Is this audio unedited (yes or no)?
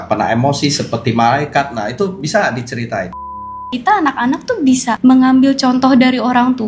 no